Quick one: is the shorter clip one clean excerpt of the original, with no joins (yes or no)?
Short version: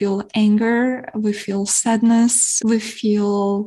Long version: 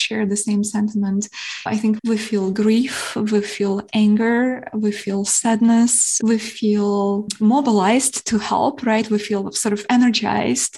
yes